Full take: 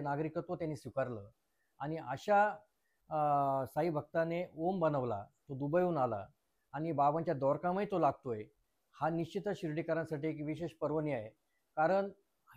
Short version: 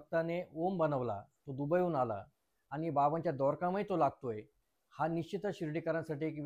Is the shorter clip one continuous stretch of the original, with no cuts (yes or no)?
yes